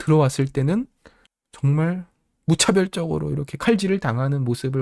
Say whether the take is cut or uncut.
uncut